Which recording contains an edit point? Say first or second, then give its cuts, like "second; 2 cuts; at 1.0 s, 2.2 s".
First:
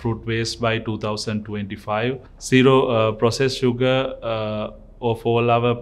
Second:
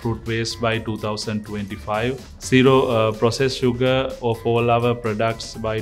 second; 1 cut; at 4.1 s